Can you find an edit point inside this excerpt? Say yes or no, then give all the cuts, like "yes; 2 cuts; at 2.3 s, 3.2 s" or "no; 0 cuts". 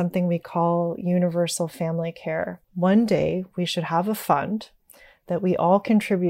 yes; 1 cut; at 2.6 s